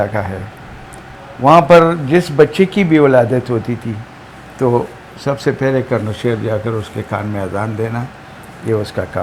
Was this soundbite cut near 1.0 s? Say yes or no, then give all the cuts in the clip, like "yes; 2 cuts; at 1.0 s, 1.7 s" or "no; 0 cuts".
no; 0 cuts